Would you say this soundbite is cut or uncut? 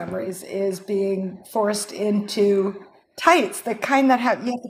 cut